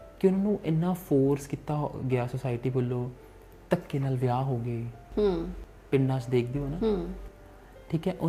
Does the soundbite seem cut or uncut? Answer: uncut